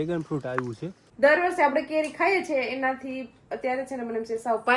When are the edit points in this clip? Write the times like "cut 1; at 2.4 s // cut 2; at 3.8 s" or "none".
cut 1; at 1.1 s